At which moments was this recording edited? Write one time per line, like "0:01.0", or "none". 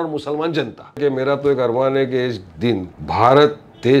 0:01.0
0:02.9